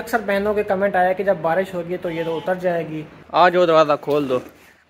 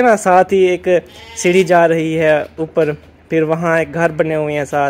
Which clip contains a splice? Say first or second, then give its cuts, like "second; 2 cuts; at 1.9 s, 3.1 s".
first; 1 cut; at 3.2 s